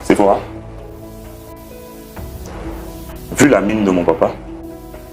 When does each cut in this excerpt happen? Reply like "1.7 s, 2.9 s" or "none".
0.9 s, 3.3 s